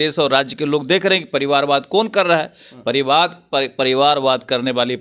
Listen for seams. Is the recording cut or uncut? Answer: uncut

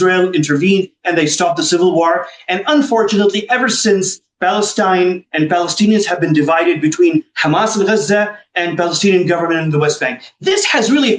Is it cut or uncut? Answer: uncut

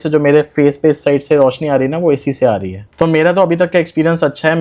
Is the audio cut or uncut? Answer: uncut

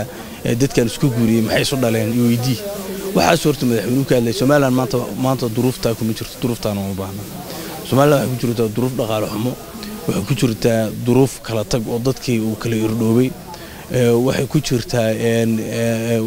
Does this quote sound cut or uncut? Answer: uncut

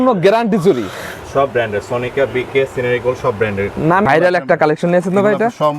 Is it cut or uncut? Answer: cut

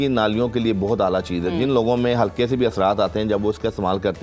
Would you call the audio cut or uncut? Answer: uncut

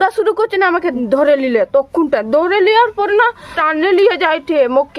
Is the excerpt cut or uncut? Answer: cut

